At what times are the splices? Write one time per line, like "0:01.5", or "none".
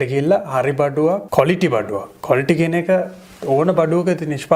0:01.2

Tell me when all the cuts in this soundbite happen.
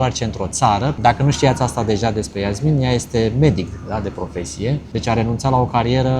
0:01.0
0:04.8

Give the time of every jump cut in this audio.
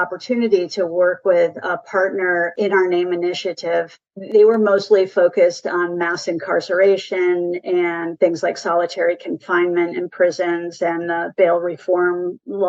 none

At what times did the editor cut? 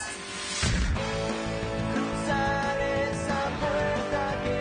none

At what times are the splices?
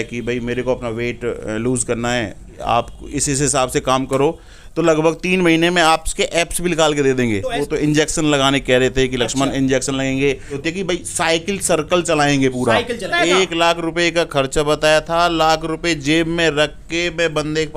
0:02.6
0:07.5
0:10.6
0:13.1

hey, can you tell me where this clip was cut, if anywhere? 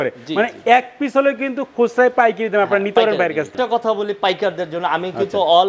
none

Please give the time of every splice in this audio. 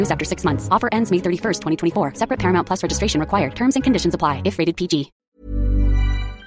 0:05.3

